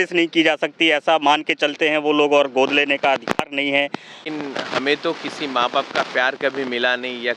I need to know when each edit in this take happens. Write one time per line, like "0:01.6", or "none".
0:04.2